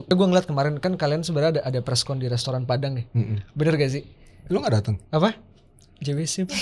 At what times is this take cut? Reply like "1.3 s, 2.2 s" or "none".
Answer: none